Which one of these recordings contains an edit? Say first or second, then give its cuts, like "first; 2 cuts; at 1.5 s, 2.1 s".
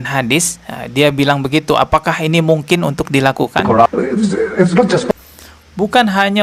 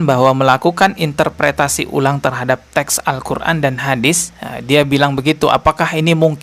first; 1 cut; at 3.9 s